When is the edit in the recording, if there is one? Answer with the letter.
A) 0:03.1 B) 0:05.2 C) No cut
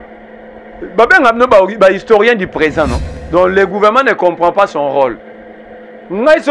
A